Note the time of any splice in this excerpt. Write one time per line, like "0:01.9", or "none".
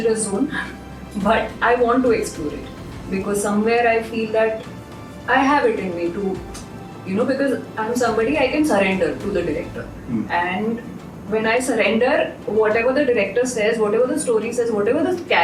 none